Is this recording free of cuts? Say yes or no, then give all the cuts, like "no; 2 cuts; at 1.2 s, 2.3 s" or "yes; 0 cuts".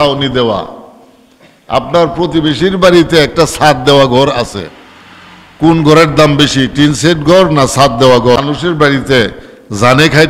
no; 1 cut; at 8.4 s